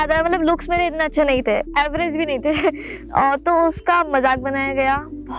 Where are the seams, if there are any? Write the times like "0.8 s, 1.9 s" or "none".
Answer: 1.7 s

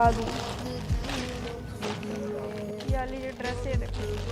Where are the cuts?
none

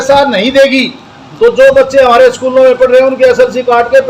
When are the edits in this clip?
none

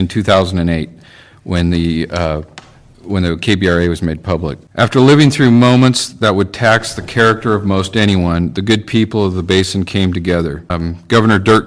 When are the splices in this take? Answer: 4.6 s, 10.7 s

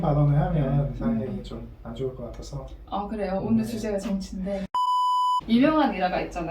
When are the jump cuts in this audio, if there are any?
5.4 s

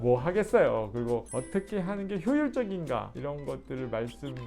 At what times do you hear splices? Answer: 1.3 s, 3.1 s

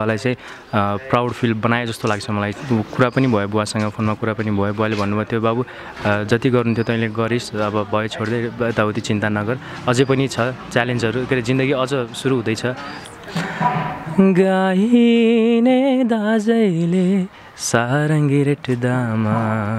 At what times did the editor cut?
2.6 s, 12.9 s

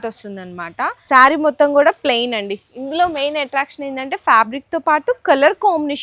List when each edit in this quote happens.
1.0 s

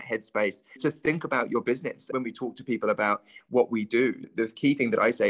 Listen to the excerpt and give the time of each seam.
0.8 s, 2.1 s, 4.2 s

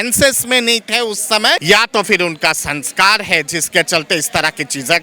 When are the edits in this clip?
1.6 s

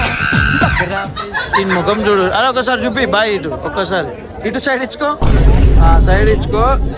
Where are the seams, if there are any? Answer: 1.6 s

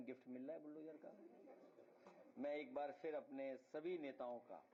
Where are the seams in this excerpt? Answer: none

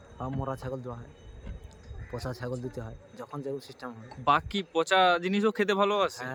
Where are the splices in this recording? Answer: none

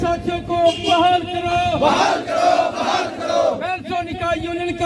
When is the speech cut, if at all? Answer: none

